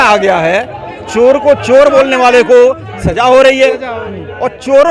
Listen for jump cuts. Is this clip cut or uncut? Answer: uncut